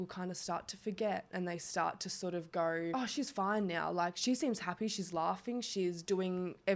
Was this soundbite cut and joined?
yes; 1 cut; at 2.9 s

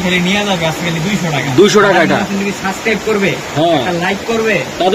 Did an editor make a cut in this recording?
no; 0 cuts

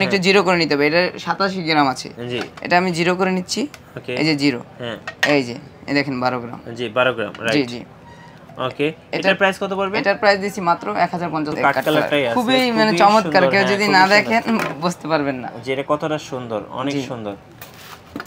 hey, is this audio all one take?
no; 1 cut; at 11.5 s

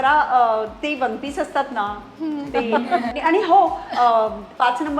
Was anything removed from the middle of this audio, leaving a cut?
yes; 1 cut; at 3.1 s

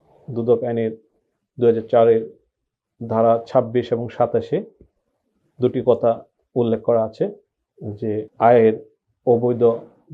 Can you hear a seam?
yes; 1 cut; at 8.3 s

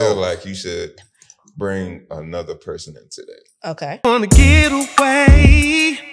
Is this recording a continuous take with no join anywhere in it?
no; 1 cut; at 3.9 s

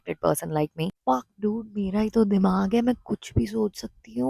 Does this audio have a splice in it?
yes; 1 cut; at 0.9 s

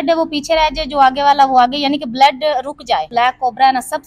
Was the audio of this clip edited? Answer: yes; 1 cut; at 3.1 s

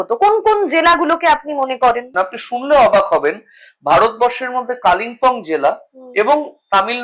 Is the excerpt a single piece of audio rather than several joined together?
no; 1 cut; at 2.1 s

